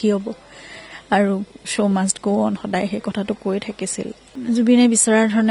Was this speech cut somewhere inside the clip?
yes; 1 cut; at 4.2 s

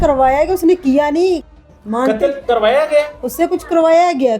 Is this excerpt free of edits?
yes; 0 cuts

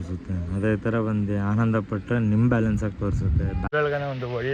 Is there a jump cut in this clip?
yes; 1 cut; at 3.6 s

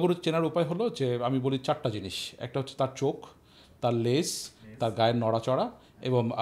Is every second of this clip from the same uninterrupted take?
yes; 0 cuts

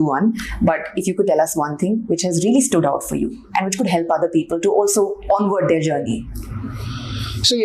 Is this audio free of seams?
yes; 0 cuts

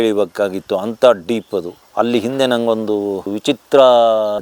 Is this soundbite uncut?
yes; 0 cuts

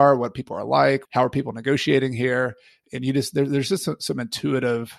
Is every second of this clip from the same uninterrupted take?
no; 1 cut; at 1.1 s

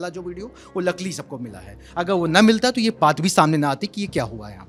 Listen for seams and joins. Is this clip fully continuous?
yes; 0 cuts

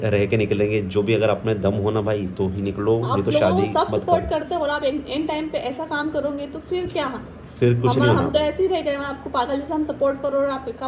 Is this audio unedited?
yes; 0 cuts

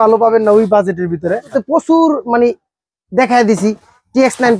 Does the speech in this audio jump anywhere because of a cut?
yes; 1 cut; at 1.6 s

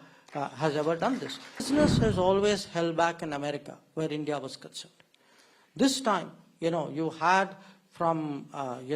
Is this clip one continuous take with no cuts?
no; 1 cut; at 1.7 s

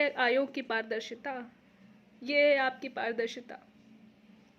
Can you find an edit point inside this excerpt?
no; 0 cuts

